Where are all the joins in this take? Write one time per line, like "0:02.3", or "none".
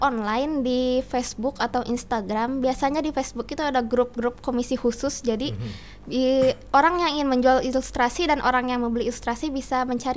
none